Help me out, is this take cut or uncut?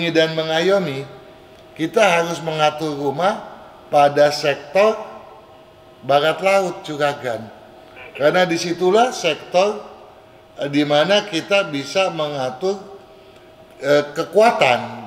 uncut